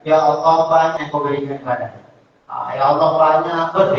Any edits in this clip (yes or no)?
yes